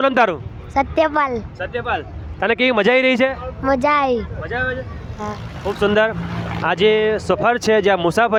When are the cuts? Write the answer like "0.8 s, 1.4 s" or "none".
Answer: none